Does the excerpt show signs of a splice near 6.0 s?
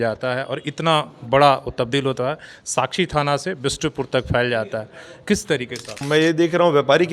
yes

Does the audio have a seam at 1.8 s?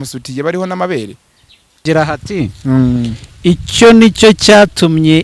yes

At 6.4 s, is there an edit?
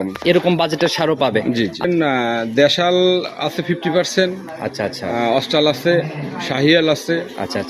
no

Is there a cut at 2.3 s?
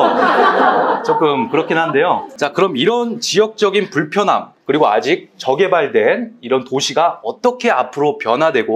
yes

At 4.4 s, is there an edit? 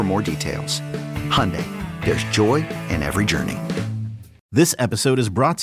yes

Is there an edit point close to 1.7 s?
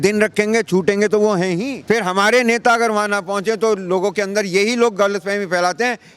yes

